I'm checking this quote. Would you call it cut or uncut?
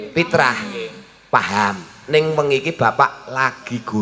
uncut